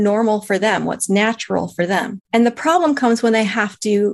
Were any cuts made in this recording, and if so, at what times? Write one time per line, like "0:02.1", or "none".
0:02.2